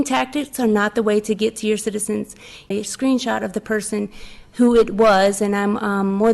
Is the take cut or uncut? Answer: cut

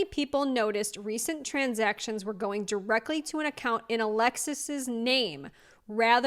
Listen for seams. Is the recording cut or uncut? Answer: uncut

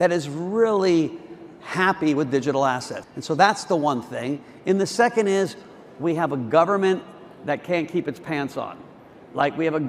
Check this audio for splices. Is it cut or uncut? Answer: cut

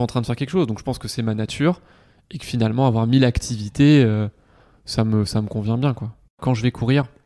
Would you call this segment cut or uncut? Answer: cut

